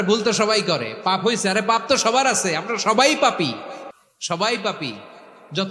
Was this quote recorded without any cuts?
yes; 0 cuts

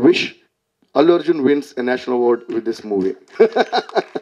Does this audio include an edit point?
yes; 1 cut; at 3.2 s

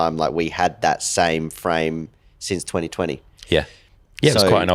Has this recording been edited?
no; 0 cuts

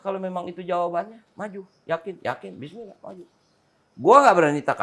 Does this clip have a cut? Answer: no; 0 cuts

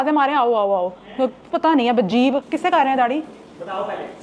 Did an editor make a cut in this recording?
no; 0 cuts

